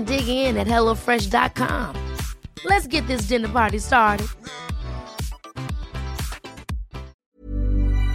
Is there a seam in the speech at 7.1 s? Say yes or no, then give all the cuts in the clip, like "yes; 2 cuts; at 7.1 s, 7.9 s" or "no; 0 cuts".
yes; 1 cut; at 7.1 s